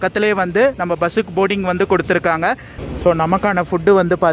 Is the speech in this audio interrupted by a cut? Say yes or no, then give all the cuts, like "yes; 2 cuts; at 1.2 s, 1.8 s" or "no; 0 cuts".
yes; 1 cut; at 2.7 s